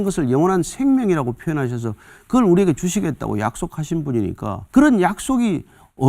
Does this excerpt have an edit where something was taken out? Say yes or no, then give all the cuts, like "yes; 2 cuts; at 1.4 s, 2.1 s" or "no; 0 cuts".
yes; 1 cut; at 4.5 s